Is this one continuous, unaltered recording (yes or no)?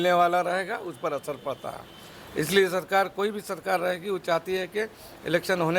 yes